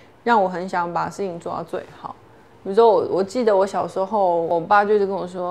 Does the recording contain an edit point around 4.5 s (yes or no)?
yes